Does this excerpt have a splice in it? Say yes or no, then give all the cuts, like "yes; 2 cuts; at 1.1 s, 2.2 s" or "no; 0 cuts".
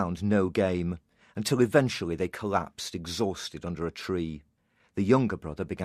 no; 0 cuts